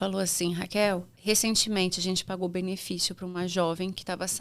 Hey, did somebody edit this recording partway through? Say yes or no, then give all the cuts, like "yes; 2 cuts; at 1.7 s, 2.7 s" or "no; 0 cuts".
yes; 1 cut; at 1.1 s